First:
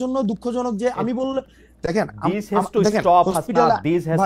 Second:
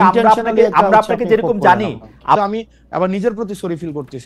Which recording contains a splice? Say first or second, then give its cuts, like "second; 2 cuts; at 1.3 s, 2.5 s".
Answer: second; 1 cut; at 2.4 s